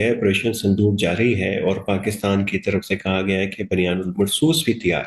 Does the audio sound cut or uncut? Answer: uncut